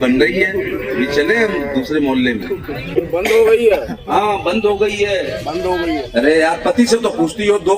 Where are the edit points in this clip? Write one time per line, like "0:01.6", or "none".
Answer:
0:02.8